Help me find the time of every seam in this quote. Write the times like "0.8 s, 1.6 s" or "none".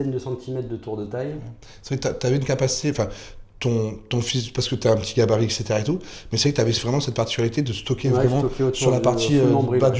none